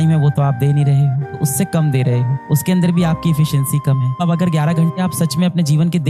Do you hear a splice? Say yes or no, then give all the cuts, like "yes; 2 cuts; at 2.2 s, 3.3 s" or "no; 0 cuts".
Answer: yes; 2 cuts; at 1.3 s, 4.2 s